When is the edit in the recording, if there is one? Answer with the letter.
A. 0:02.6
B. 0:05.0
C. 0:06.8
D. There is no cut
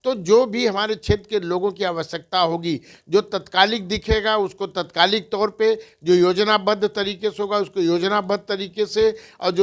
D